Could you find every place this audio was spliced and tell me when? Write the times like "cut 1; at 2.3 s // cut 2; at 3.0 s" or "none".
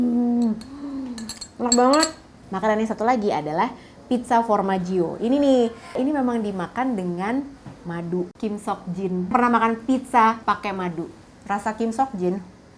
none